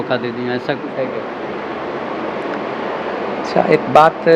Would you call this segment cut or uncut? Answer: uncut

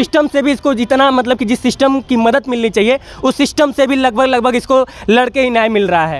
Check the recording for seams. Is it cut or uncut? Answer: uncut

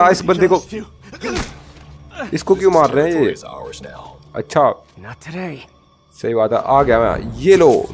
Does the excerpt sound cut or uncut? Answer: uncut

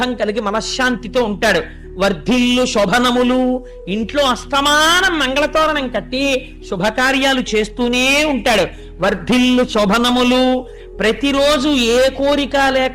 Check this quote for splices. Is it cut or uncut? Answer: uncut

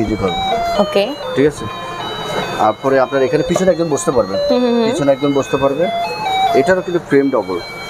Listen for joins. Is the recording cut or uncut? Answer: uncut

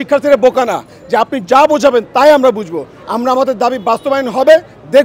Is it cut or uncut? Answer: uncut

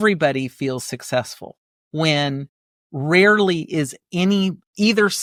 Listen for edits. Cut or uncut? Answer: uncut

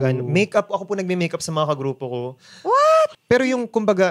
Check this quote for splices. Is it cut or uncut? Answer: uncut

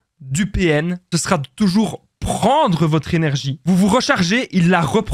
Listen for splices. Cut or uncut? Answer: cut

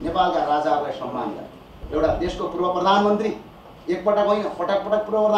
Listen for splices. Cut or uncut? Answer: cut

